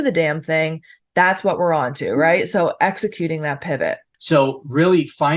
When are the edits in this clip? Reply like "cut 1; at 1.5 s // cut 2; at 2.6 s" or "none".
cut 1; at 4.1 s